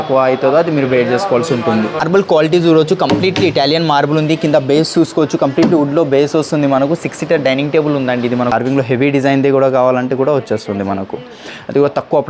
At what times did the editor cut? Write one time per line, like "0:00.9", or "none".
0:02.0
0:08.5